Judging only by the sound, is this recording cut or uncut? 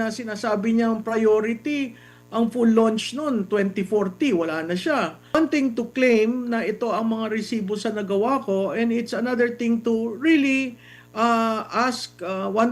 cut